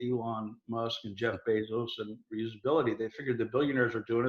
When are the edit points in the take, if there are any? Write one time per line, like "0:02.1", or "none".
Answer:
none

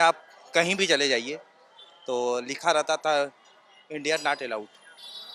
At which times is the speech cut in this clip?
none

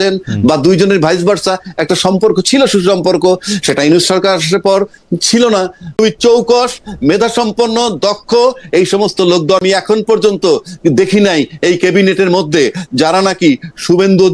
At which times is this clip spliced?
0:05.9
0:09.6

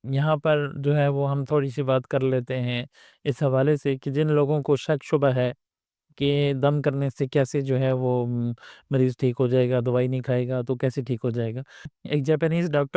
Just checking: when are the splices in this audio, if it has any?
0:11.9

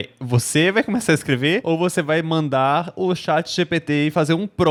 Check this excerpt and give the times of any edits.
none

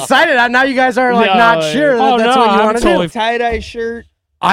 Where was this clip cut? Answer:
0:03.1

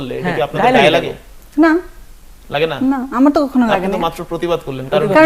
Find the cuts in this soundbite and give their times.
none

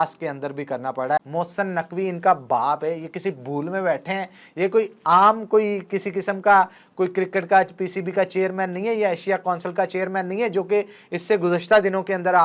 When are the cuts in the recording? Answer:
0:01.2
0:05.0

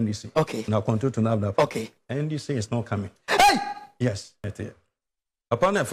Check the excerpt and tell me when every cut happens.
0:04.4

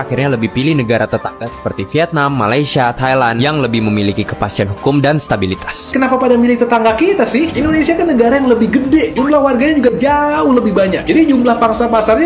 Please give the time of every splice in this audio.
0:05.9

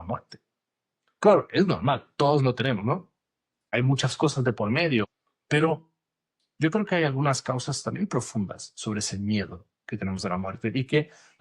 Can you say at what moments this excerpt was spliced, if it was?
0:03.7
0:05.1

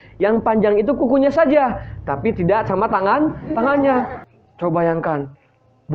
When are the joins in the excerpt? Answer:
0:04.2

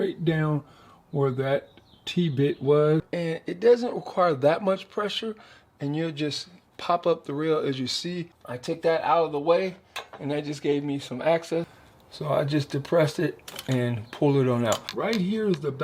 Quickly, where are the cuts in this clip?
0:03.1
0:08.5
0:11.8
0:14.9

